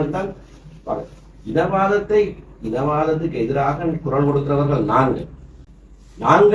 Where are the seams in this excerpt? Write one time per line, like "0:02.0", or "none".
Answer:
none